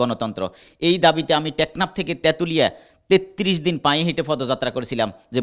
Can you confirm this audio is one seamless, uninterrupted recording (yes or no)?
yes